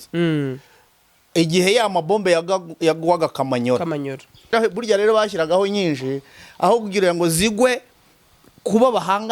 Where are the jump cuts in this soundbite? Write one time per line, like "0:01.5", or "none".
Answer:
0:04.5